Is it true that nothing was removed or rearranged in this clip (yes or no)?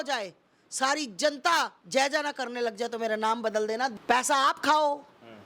no